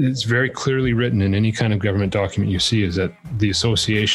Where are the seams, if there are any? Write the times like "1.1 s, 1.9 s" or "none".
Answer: none